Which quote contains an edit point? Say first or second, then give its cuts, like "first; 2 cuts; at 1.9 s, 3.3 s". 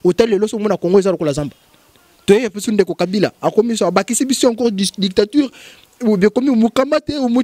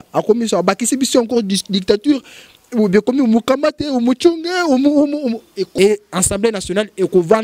second; 1 cut; at 5.6 s